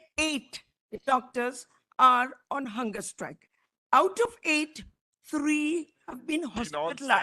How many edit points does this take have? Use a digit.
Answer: 0